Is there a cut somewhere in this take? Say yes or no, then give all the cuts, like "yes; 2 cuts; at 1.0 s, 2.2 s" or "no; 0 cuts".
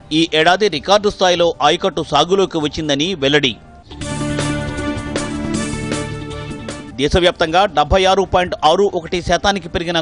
no; 0 cuts